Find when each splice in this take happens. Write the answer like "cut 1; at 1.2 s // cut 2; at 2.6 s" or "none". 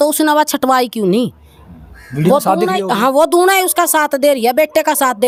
none